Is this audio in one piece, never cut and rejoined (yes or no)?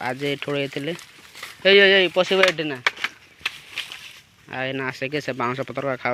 yes